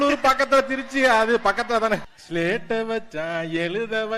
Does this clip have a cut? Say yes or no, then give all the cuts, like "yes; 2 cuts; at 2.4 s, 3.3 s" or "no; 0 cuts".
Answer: yes; 1 cut; at 2.2 s